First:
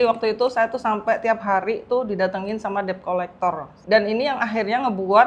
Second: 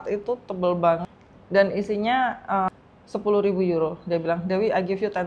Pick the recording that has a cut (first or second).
second